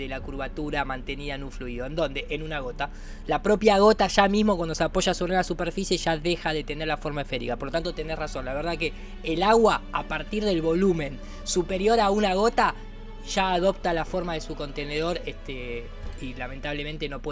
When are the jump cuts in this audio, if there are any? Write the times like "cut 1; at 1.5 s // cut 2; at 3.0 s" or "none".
none